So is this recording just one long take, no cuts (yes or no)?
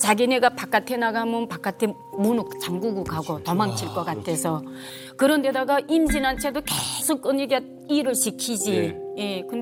yes